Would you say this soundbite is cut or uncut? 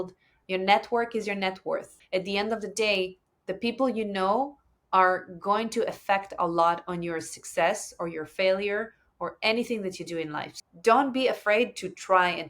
cut